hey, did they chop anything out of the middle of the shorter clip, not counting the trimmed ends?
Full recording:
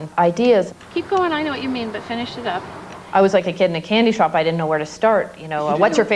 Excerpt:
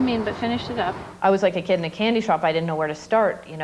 yes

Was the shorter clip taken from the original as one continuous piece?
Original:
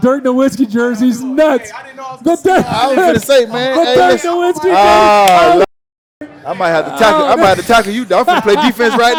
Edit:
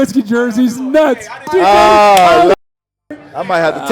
no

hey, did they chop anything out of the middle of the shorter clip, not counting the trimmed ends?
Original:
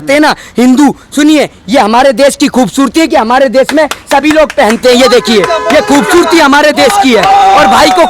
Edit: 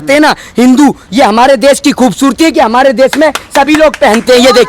yes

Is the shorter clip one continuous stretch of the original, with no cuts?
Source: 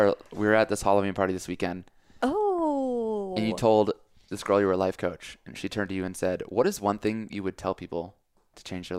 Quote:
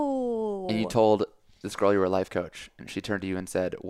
yes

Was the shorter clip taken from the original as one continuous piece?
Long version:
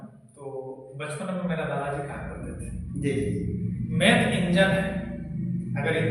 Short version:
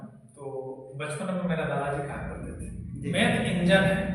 no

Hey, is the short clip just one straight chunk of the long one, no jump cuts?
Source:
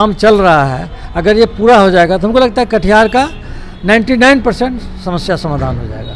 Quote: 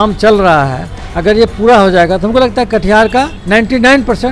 no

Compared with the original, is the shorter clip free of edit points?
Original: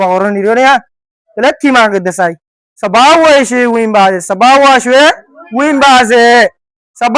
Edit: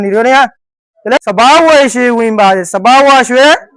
no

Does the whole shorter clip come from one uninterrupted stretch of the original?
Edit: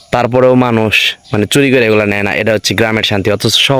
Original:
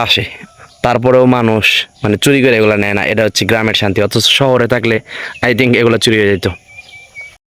yes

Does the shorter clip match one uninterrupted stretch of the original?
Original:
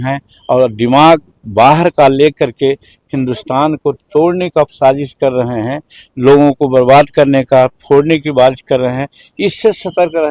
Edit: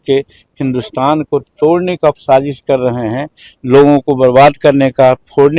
yes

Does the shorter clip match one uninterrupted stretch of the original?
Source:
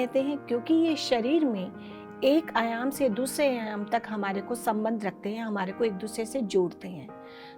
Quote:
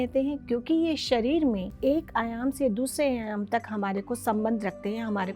no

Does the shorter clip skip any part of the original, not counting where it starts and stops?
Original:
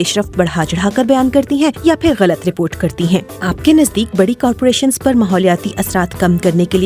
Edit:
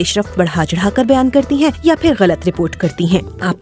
no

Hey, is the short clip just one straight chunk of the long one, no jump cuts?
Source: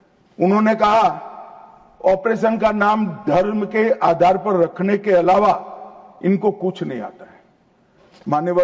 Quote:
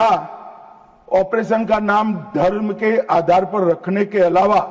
yes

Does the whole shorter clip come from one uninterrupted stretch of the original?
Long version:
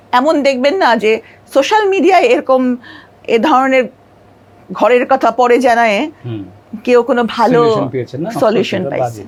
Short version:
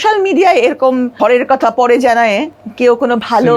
no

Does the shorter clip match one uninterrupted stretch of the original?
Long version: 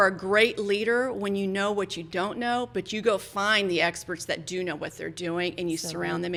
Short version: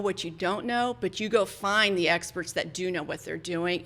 yes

